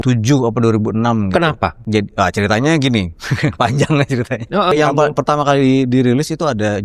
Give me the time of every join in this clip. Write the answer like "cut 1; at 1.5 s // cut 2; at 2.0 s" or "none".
cut 1; at 1.8 s // cut 2; at 4.7 s